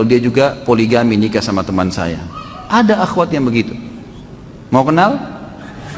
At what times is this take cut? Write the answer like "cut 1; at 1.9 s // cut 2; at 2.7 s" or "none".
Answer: none